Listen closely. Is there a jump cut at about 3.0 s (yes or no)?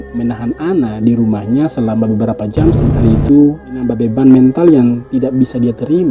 yes